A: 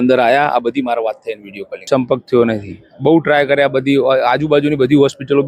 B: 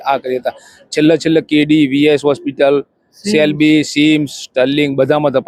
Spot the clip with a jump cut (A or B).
A